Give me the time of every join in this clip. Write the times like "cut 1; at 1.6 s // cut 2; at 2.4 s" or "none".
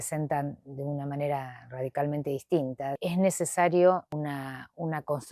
cut 1; at 3.0 s // cut 2; at 4.1 s